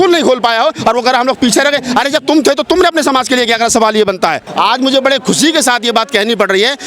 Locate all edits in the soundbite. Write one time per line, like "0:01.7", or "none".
0:04.4